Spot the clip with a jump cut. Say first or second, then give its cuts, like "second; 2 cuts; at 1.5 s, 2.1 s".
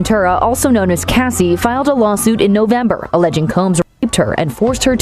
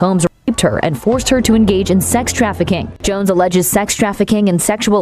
second; 1 cut; at 2.9 s